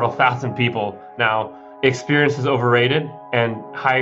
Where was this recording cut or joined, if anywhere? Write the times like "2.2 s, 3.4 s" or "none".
1.7 s